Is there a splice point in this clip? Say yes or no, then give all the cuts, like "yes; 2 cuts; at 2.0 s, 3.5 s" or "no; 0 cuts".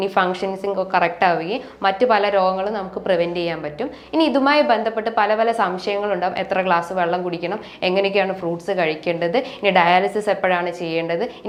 no; 0 cuts